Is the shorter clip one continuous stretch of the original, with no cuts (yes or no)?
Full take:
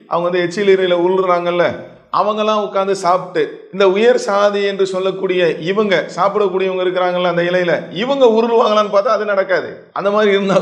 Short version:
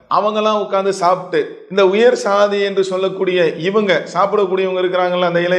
yes